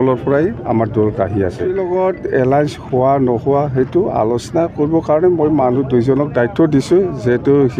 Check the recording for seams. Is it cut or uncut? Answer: cut